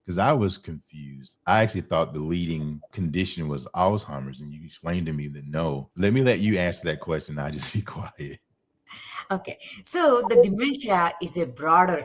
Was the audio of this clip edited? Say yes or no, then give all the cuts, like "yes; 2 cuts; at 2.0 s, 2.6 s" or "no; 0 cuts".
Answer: yes; 2 cuts; at 1.3 s, 2.9 s